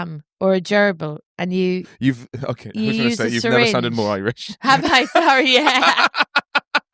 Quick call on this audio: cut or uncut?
uncut